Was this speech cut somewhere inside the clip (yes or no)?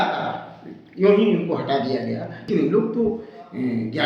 yes